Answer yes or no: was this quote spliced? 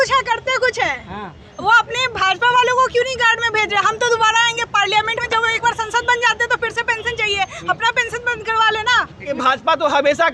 yes